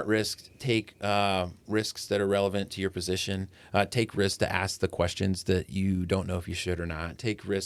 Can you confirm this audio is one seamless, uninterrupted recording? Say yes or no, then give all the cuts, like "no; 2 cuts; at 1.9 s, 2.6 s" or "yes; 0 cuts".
yes; 0 cuts